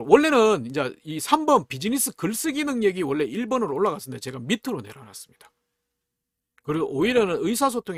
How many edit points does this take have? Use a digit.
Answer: 0